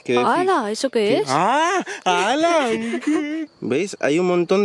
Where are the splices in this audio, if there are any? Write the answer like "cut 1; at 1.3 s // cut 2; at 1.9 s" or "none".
cut 1; at 3.4 s